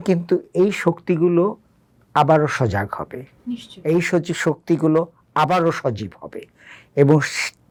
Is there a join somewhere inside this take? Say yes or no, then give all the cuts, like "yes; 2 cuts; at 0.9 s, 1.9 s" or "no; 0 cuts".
no; 0 cuts